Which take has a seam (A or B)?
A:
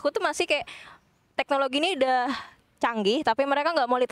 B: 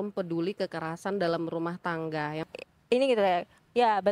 B